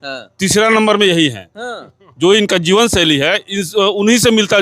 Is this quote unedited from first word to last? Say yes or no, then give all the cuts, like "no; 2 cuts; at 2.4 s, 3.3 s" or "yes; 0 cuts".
yes; 0 cuts